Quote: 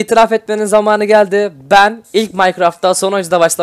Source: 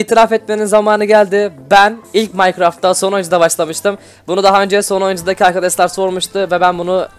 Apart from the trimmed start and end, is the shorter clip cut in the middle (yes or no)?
no